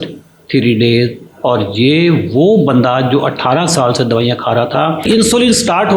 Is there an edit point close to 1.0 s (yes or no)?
no